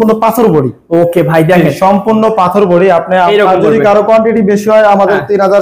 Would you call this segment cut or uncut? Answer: cut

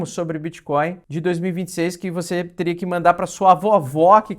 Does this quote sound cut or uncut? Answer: cut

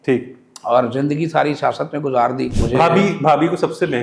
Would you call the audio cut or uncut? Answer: cut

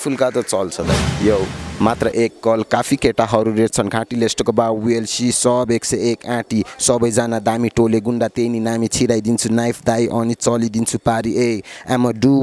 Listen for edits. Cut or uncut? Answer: cut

